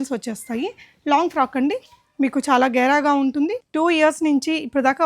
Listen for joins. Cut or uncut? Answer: cut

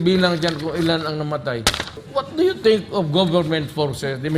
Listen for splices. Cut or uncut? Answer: cut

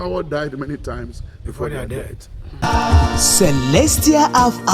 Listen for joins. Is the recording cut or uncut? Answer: cut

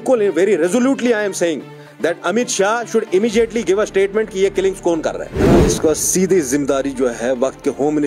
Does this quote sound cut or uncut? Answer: cut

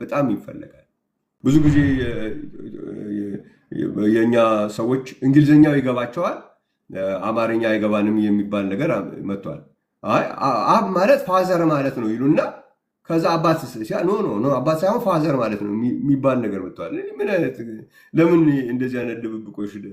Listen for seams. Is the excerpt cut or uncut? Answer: cut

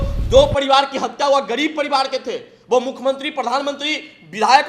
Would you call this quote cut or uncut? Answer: uncut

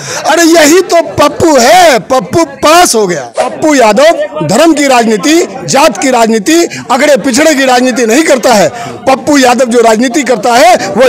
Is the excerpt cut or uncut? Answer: cut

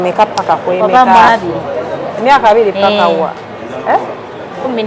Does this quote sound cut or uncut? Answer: cut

